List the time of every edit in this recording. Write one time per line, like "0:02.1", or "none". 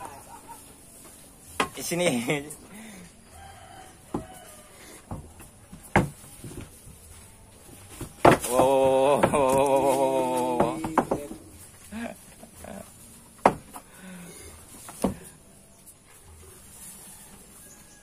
none